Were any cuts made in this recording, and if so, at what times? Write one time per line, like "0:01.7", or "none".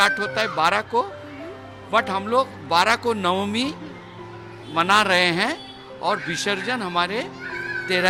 none